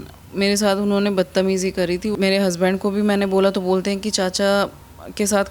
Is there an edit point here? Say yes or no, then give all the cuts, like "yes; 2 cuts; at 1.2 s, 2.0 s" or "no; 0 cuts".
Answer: yes; 1 cut; at 2.1 s